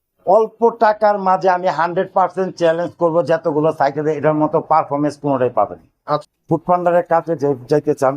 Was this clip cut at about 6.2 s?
yes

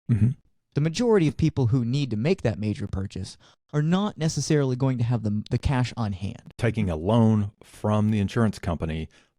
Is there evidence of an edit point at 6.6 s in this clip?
yes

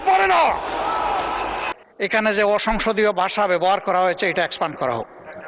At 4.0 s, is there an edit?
no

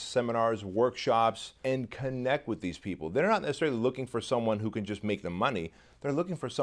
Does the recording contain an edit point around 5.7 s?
no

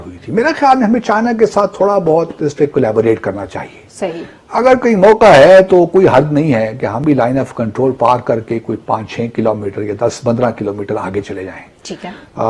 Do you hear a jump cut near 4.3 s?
no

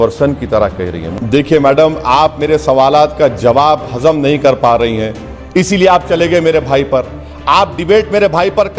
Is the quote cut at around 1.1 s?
yes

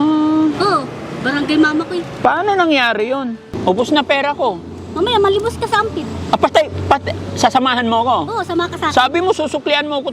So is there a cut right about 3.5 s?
yes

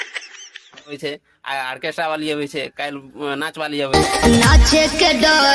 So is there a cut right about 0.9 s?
yes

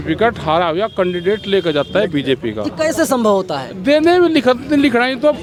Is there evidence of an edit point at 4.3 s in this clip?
no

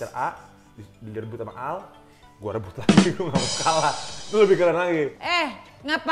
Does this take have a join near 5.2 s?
yes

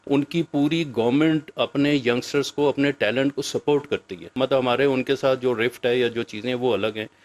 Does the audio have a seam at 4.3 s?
yes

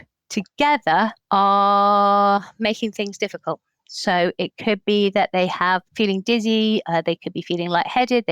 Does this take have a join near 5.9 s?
yes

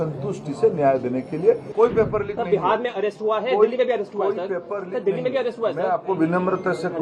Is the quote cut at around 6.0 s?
no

